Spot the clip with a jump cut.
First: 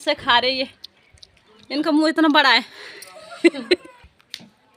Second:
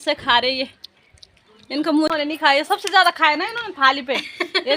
second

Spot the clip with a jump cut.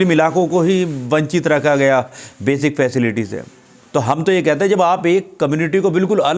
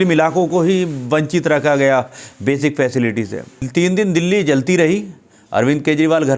second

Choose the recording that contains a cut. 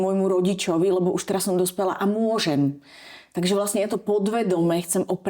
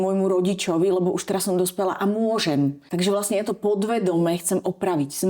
second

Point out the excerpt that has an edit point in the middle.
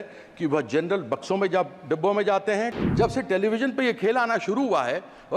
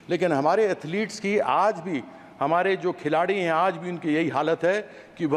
first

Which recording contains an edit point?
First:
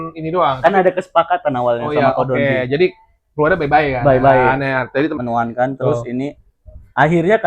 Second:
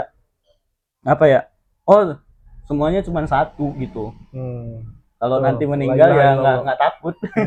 first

